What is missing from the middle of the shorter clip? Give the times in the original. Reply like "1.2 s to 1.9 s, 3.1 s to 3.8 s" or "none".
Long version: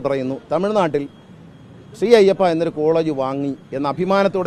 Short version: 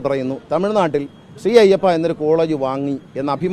1.2 s to 1.8 s